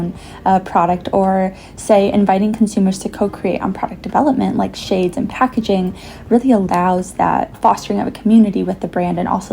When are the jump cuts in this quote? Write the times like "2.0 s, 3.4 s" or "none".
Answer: 7.6 s